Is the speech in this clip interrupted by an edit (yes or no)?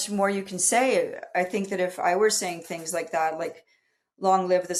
no